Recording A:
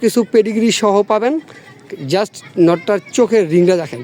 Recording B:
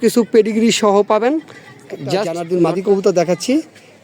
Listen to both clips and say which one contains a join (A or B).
B